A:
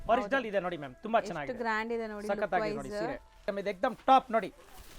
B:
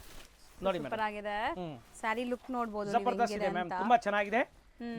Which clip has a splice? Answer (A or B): A